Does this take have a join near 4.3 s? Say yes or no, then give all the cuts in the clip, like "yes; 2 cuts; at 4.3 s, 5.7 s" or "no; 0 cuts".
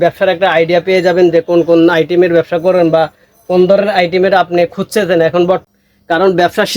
no; 1 cut; at 5.7 s